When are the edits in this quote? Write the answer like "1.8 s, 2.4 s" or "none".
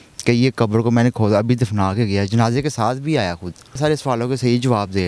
3.8 s